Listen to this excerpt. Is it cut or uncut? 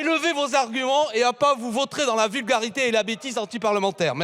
uncut